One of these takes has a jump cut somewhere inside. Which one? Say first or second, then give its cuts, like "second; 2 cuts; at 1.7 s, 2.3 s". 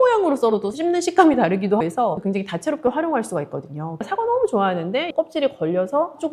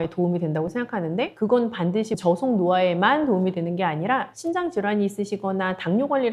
first; 3 cuts; at 2.0 s, 4.1 s, 5.1 s